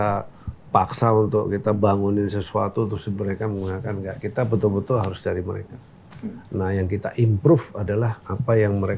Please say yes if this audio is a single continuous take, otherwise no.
yes